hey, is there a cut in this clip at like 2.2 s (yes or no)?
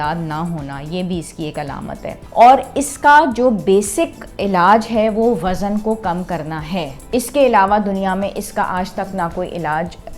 yes